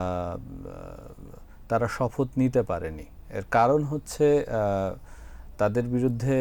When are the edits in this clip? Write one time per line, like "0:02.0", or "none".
none